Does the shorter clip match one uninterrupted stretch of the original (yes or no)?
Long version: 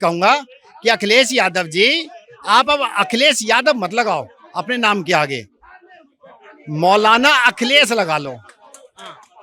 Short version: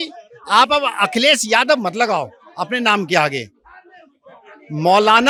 yes